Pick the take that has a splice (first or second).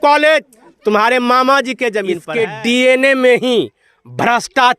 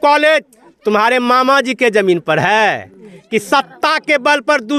first